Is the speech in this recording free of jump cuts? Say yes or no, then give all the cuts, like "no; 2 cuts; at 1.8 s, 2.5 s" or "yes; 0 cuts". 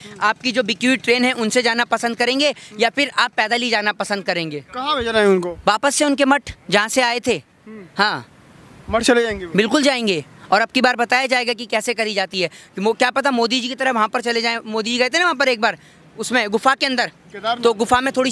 yes; 0 cuts